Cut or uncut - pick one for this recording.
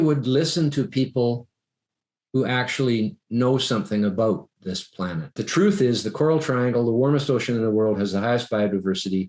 cut